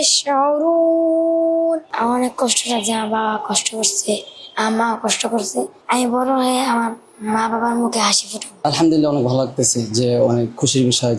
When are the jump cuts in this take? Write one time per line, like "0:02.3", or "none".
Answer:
0:01.8
0:08.5